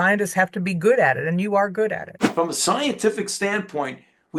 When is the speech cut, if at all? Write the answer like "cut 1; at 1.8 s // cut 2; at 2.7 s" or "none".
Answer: cut 1; at 2.2 s